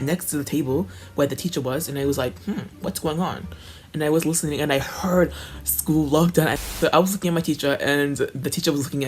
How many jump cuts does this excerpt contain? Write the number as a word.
one